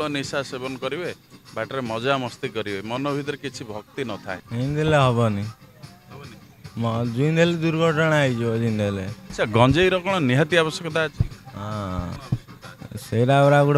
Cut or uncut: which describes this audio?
cut